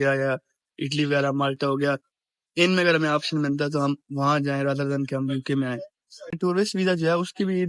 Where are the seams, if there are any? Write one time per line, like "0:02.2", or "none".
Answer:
0:06.4